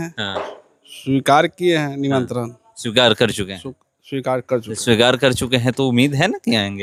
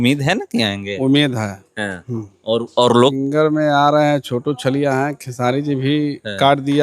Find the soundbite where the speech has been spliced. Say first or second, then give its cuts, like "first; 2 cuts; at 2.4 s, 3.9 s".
second; 1 cut; at 3.1 s